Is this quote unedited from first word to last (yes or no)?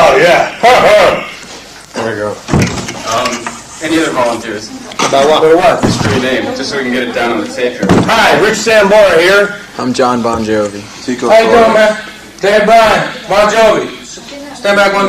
yes